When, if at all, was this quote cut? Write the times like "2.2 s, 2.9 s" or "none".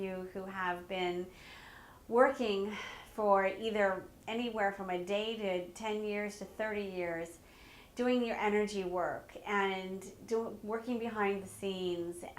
11.4 s